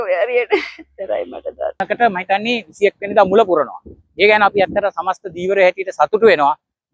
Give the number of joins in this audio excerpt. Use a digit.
1